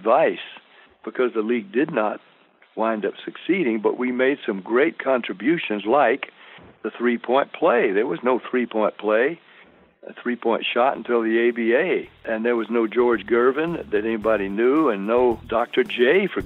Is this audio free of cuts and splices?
no; 2 cuts; at 12.2 s, 15.4 s

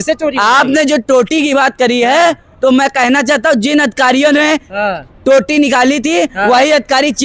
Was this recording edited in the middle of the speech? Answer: no; 0 cuts

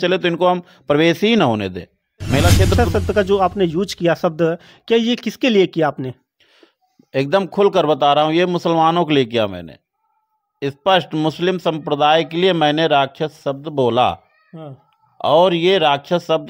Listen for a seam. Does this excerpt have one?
yes; 1 cut; at 2.8 s

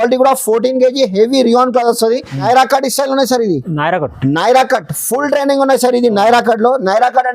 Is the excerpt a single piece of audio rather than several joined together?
no; 1 cut; at 2.4 s

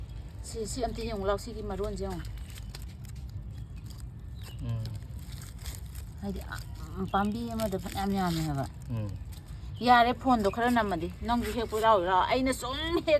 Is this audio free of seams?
yes; 0 cuts

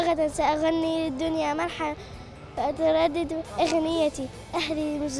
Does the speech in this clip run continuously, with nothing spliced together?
yes; 0 cuts

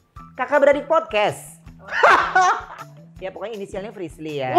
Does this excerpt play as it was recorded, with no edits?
no; 1 cut; at 2.7 s

